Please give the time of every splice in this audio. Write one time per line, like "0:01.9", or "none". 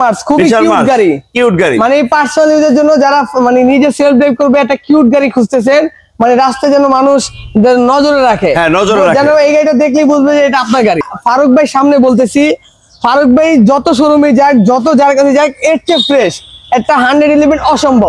0:11.1